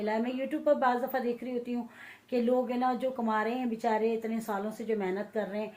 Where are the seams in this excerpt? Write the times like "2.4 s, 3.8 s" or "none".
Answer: none